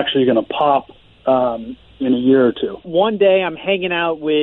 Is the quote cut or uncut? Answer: cut